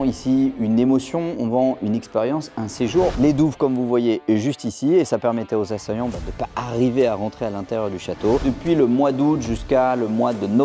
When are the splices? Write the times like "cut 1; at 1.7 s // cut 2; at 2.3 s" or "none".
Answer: cut 1; at 3.1 s // cut 2; at 8.4 s